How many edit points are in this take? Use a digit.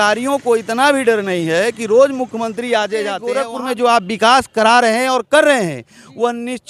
1